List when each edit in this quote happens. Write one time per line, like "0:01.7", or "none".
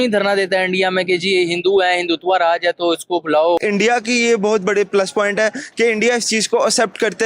0:03.6